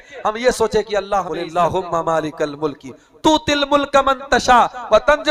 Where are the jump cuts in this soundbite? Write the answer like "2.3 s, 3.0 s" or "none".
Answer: 1.4 s